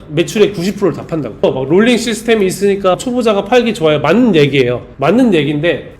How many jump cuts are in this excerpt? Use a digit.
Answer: 2